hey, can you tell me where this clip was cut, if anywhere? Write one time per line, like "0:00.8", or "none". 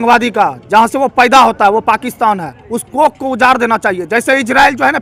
none